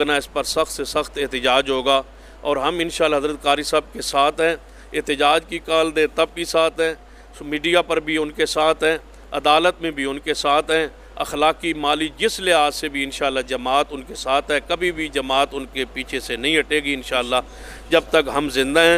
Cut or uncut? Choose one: uncut